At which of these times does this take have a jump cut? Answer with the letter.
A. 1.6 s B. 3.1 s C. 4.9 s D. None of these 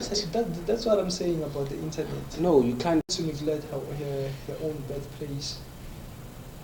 B